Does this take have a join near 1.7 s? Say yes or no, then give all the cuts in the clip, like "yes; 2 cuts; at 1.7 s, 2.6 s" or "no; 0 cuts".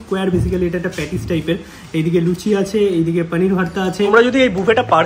no; 1 cut; at 4.1 s